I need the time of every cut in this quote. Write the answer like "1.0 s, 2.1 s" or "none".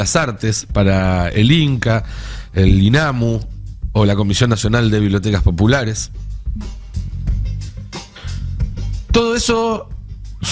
none